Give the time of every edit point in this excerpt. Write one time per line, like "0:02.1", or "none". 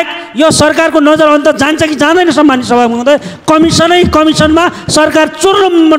none